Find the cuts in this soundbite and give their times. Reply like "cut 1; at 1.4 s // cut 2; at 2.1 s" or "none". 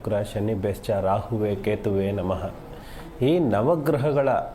cut 1; at 1.9 s // cut 2; at 3.6 s